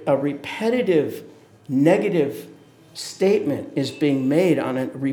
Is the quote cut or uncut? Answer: uncut